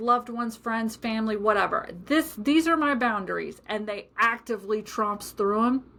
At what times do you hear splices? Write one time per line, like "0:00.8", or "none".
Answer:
none